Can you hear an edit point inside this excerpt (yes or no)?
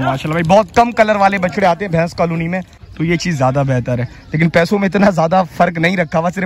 yes